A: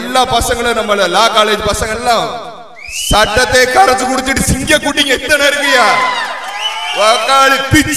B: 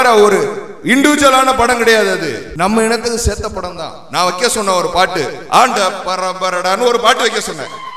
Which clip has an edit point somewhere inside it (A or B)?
B